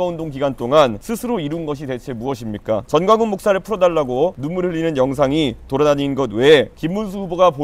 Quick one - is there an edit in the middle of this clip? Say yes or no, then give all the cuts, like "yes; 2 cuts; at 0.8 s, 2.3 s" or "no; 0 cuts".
yes; 4 cuts; at 1.0 s, 2.9 s, 4.4 s, 6.8 s